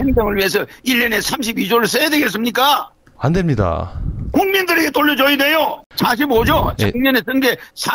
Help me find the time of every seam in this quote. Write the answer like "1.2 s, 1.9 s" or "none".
5.8 s